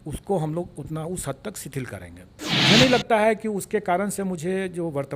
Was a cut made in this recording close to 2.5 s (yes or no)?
yes